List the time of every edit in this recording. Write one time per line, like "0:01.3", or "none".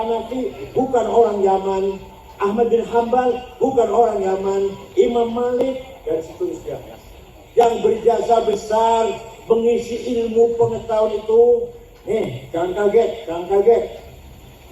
0:07.0